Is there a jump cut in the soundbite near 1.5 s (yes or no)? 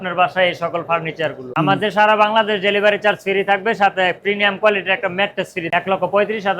yes